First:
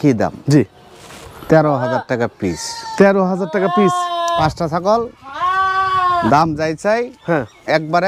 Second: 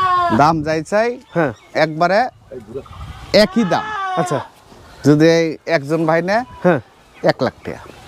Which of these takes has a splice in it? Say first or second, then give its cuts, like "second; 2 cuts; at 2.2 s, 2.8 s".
first; 1 cut; at 4.4 s